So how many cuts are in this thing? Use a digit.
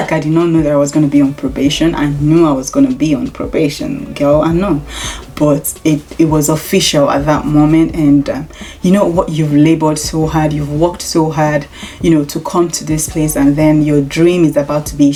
0